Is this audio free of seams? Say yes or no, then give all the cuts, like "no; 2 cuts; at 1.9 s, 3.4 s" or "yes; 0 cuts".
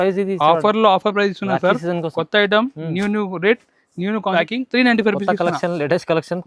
no; 1 cut; at 4.3 s